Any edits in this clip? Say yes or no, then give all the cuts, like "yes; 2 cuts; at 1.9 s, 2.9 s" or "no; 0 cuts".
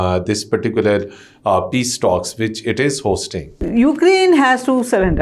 yes; 1 cut; at 3.5 s